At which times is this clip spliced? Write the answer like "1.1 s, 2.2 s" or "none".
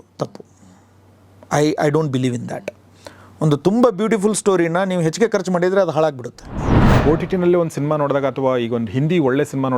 6.9 s